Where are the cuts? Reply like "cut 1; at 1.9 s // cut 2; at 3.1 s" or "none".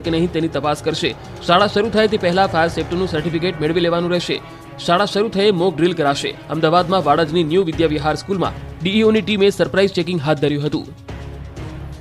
none